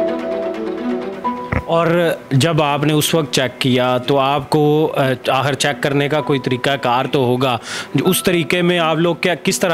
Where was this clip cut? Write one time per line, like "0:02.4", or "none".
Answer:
none